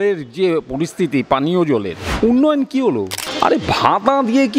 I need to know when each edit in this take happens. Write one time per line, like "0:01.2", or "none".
0:02.0
0:03.2